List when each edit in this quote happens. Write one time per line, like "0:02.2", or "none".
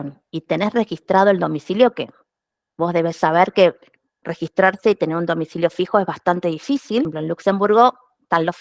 0:07.2